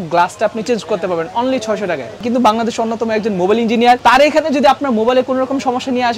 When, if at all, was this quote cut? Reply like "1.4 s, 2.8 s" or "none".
2.2 s

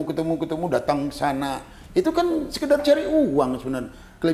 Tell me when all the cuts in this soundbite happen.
none

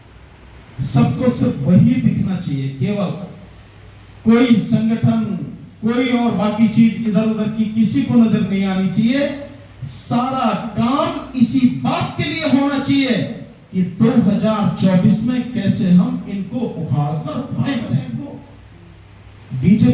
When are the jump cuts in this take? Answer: 17.9 s

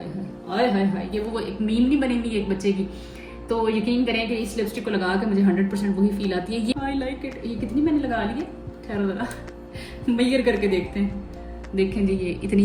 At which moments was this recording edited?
6.8 s

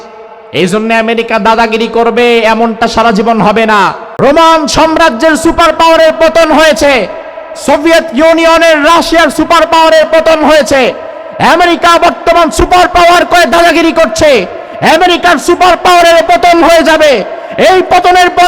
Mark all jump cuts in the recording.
4.0 s

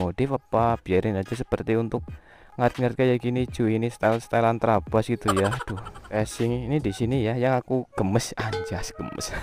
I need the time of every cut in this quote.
6.1 s

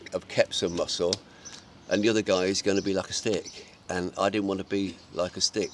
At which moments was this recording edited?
none

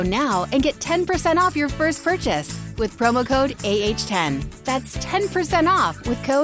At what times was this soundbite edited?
none

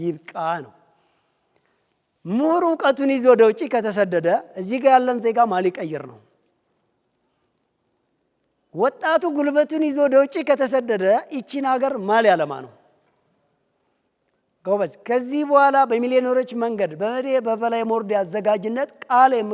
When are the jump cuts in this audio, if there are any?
none

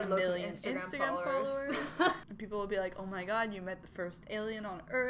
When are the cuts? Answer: 2.2 s

